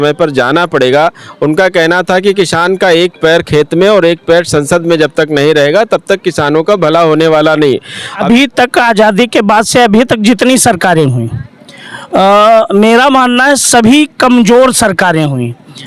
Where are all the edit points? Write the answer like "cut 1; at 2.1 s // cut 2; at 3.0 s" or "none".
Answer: cut 1; at 8.1 s

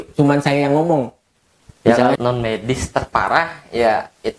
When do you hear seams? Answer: cut 1; at 2.2 s

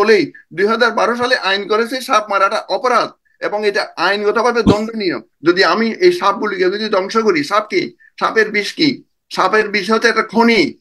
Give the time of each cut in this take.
cut 1; at 5.3 s

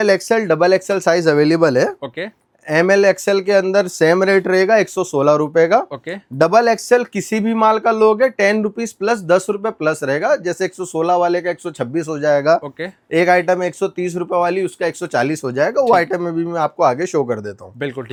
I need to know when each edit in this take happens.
none

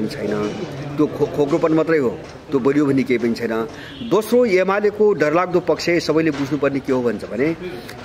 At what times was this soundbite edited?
none

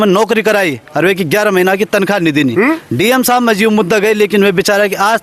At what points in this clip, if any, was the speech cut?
none

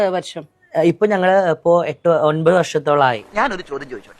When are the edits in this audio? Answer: cut 1; at 1.0 s

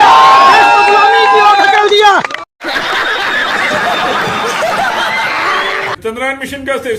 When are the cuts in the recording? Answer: cut 1; at 2.4 s // cut 2; at 6.0 s

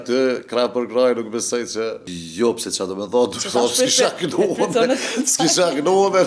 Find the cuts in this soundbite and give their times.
cut 1; at 2.1 s

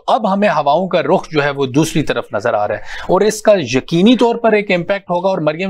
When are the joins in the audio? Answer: none

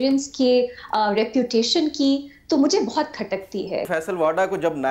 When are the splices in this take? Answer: cut 1; at 3.9 s

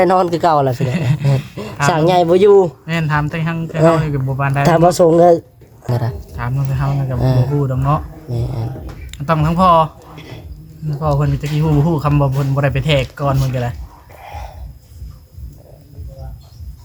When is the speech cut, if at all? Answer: cut 1; at 5.9 s

